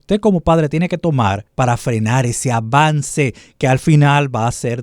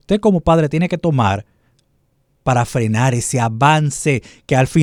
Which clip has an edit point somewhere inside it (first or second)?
first